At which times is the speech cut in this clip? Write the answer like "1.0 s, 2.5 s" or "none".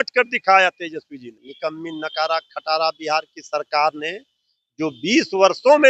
1.4 s